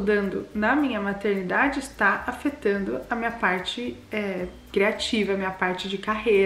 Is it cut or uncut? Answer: uncut